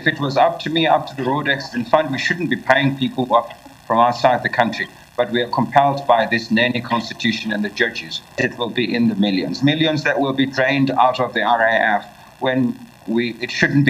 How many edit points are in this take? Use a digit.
1